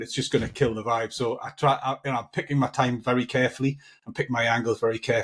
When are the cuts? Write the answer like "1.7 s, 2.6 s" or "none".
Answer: none